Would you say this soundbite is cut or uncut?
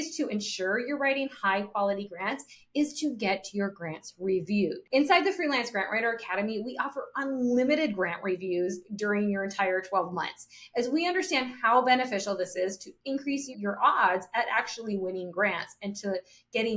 cut